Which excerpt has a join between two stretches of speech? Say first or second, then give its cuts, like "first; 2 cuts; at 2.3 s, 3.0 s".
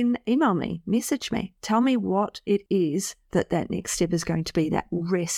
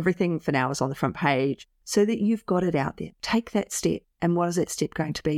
second; 2 cuts; at 1.6 s, 3.1 s